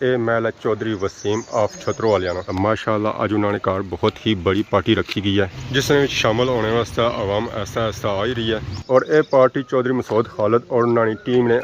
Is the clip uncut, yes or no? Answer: yes